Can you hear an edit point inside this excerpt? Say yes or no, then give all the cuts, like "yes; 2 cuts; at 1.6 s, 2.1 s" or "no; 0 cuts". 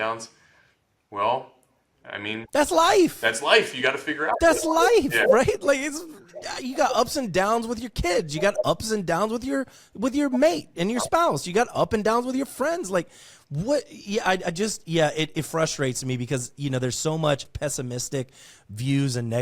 yes; 1 cut; at 17.5 s